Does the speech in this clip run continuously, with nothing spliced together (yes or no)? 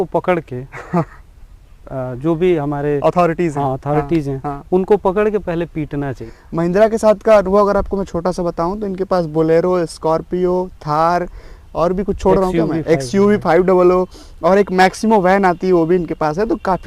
no